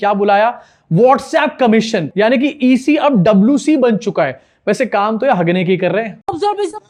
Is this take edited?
no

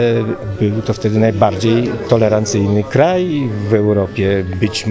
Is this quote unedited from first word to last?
yes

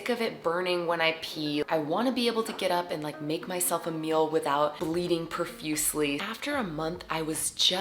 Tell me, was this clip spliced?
no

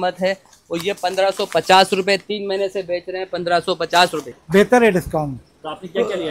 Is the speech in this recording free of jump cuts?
no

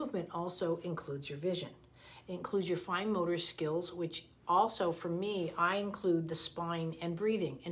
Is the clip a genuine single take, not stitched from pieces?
yes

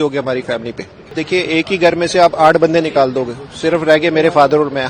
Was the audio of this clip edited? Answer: yes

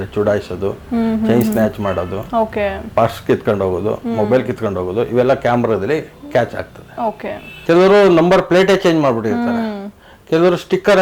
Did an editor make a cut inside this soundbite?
yes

